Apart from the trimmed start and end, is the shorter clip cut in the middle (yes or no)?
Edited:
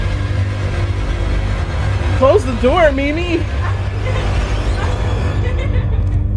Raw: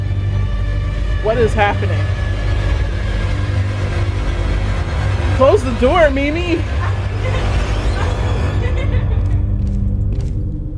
no